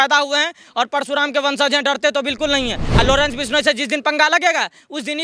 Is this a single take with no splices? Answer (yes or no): no